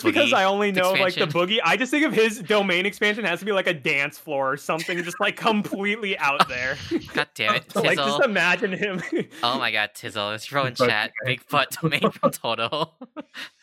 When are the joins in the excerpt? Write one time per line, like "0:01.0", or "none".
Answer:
none